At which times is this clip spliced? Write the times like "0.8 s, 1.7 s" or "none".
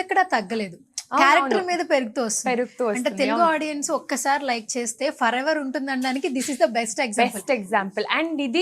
none